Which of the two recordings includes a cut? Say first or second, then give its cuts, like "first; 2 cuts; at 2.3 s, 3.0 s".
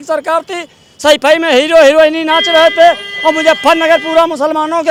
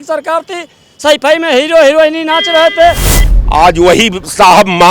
second; 1 cut; at 3.1 s